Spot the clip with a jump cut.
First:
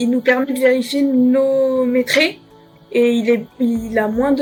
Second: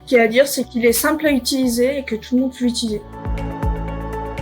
second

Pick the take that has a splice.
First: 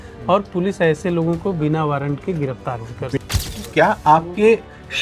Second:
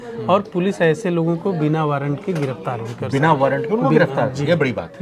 first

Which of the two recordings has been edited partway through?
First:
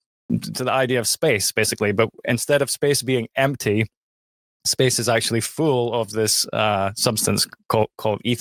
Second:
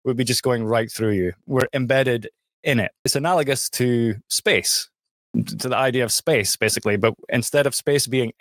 second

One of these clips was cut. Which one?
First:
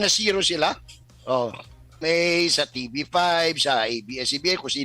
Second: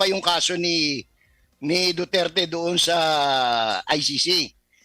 first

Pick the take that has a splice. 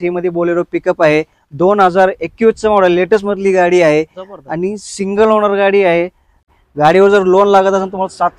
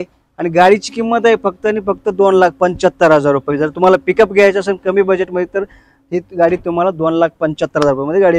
first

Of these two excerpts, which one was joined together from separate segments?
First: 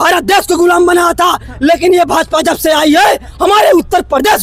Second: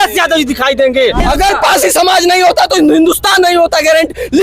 second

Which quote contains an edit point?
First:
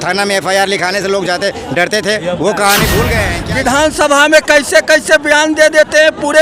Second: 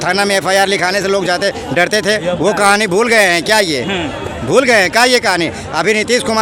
first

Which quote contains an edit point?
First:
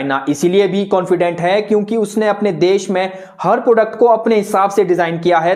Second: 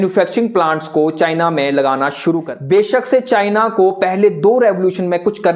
second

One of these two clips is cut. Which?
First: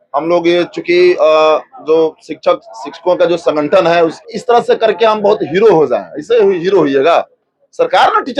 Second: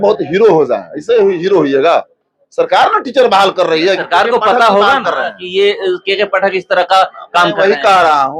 first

